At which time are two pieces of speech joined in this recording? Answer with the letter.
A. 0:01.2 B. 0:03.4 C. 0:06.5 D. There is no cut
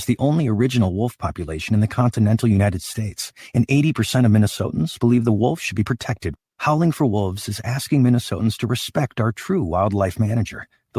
D